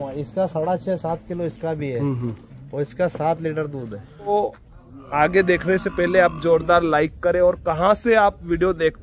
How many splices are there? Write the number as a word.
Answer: one